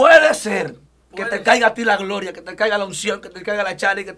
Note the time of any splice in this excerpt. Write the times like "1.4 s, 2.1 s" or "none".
none